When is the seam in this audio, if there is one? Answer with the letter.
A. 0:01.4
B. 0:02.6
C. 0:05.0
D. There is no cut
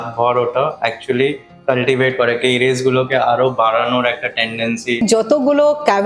C